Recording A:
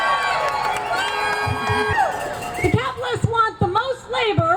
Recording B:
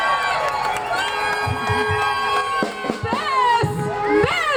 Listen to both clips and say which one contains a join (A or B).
A